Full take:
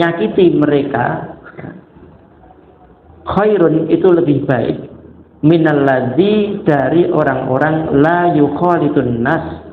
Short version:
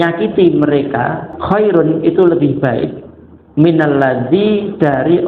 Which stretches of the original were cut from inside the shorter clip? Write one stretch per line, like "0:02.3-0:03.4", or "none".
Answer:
0:01.3-0:03.1